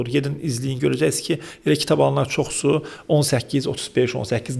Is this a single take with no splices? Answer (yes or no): yes